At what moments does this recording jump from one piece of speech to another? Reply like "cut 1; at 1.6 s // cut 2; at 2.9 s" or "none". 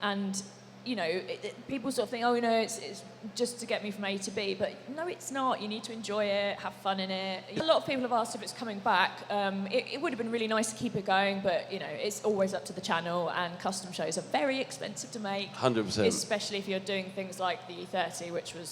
cut 1; at 7.6 s